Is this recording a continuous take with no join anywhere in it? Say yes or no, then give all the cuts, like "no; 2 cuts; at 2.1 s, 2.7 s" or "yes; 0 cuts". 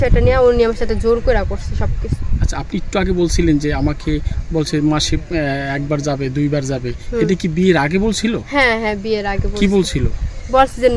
yes; 0 cuts